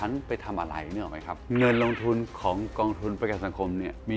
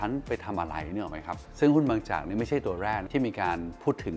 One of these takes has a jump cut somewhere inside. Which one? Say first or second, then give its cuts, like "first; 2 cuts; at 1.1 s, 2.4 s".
first; 1 cut; at 1.4 s